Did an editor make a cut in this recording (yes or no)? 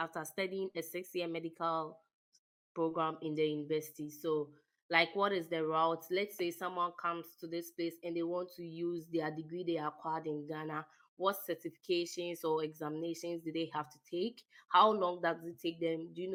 no